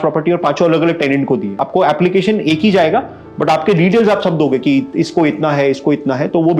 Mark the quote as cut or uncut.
cut